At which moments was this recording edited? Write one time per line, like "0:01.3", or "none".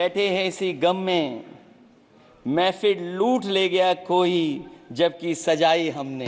none